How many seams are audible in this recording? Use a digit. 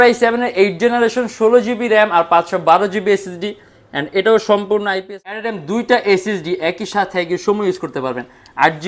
1